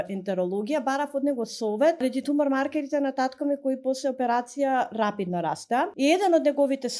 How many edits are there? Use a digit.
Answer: 2